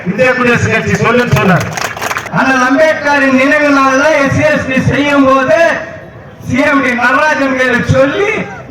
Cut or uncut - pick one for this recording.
cut